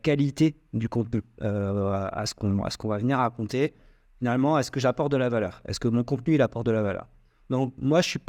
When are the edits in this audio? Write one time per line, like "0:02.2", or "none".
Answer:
none